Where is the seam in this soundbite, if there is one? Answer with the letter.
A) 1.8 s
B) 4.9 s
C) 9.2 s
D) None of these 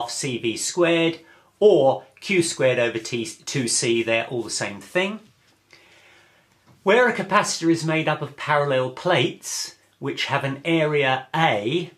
A